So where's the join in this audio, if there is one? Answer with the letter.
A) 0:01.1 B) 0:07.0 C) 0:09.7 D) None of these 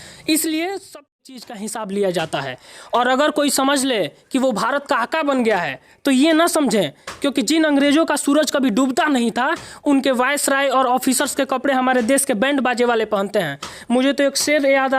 A